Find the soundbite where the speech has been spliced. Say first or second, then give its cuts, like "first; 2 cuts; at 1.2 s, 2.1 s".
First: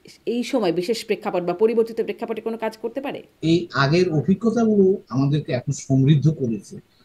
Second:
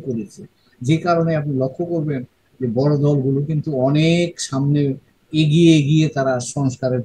first; 1 cut; at 3.2 s